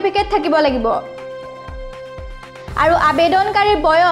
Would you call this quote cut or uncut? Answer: cut